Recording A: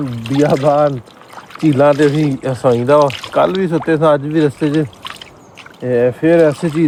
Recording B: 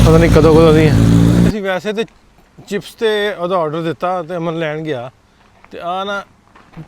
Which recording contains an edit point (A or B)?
B